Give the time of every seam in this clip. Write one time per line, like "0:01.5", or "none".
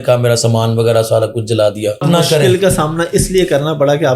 0:02.0